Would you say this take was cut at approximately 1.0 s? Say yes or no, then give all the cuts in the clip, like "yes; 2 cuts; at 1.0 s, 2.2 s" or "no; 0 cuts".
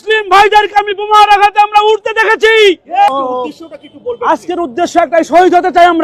no; 1 cut; at 3.1 s